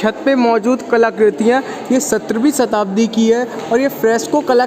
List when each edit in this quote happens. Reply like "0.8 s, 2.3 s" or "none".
none